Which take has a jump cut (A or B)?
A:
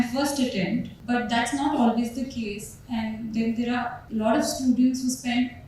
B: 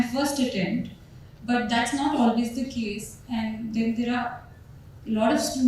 A